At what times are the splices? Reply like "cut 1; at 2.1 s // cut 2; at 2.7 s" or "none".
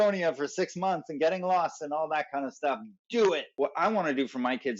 cut 1; at 3.5 s